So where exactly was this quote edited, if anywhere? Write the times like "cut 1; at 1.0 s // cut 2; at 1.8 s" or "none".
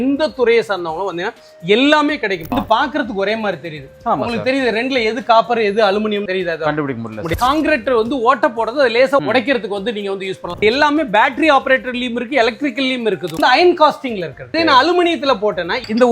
cut 1; at 2.4 s // cut 2; at 7.3 s // cut 3; at 10.5 s // cut 4; at 13.4 s